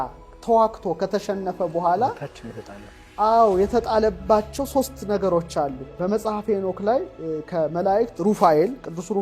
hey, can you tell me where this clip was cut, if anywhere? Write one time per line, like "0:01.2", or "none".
0:05.9